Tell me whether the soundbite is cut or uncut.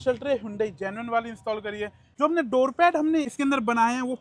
cut